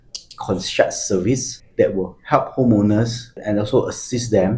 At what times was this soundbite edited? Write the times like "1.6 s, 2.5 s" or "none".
none